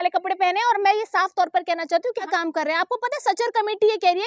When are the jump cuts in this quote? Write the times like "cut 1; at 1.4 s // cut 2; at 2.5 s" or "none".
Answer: cut 1; at 2.3 s